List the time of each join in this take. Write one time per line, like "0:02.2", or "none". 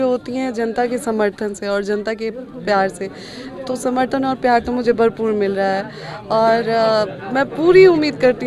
none